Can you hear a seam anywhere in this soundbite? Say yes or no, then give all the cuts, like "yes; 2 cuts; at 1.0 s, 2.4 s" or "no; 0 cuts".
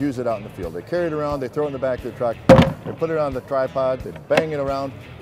no; 0 cuts